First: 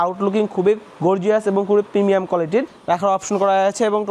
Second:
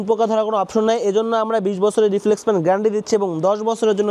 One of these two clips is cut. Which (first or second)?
first